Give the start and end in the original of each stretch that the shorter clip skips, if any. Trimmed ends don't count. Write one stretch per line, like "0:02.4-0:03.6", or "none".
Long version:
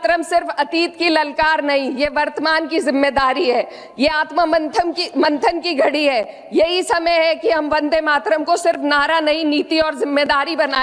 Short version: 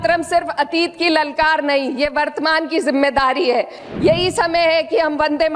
0:03.8-0:06.4

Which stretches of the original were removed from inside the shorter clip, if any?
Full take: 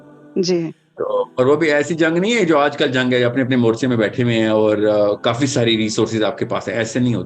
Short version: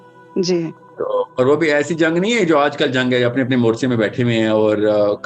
none

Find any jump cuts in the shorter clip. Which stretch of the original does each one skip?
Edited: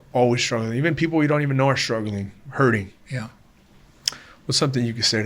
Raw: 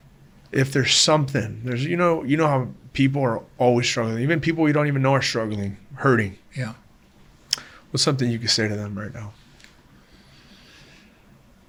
none

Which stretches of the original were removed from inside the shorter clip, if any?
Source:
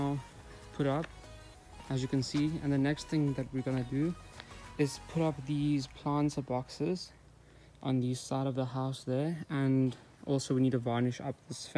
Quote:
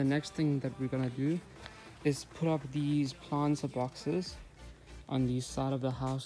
none

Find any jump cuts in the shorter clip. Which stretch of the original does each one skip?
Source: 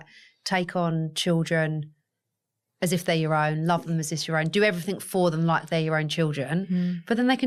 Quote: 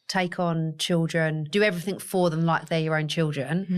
0:01.8-0:04.5

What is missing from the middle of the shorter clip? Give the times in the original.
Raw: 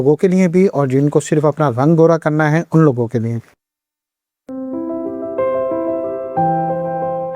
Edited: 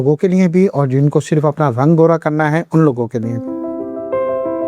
0:03.4-0:04.6

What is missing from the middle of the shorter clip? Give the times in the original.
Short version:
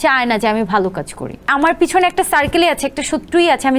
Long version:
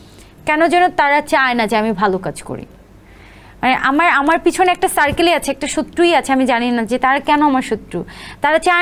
0:02.8-0:04.1

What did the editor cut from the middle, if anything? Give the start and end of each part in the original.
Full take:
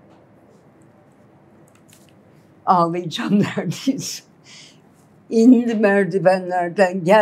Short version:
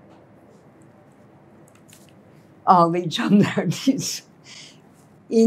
none

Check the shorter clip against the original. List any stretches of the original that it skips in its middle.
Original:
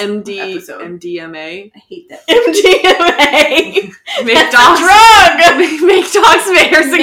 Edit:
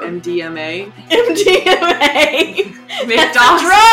0:01.7-0:02.1

